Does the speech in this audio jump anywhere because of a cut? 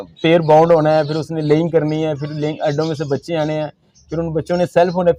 no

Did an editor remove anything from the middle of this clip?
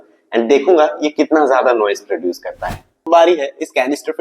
yes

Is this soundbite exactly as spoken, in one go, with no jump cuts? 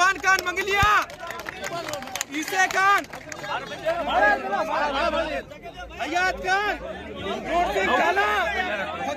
yes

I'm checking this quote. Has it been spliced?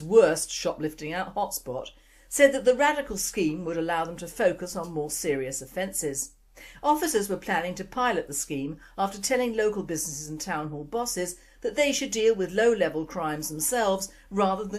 yes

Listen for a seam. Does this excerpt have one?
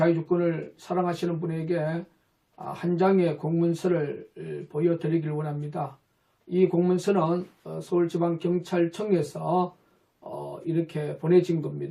no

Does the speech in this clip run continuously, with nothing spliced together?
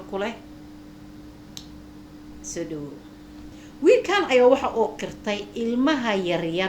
no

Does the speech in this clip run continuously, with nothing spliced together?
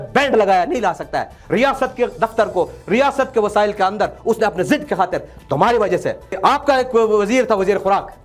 no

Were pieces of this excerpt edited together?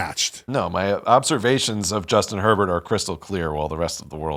no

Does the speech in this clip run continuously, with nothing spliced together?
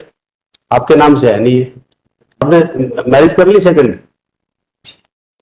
no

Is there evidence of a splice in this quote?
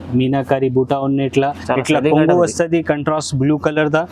yes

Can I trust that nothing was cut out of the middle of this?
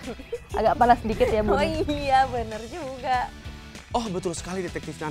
no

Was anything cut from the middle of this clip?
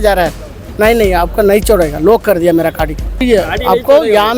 yes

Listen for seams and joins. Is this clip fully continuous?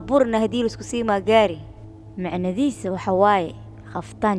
yes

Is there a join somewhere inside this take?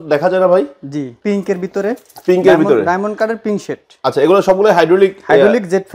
yes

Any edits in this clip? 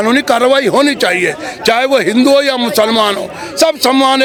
no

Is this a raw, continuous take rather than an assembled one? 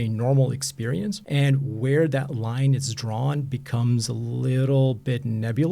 no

